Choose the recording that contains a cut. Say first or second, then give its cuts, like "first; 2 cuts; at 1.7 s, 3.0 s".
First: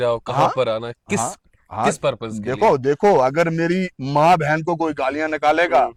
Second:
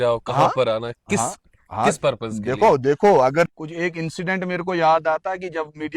second; 1 cut; at 3.5 s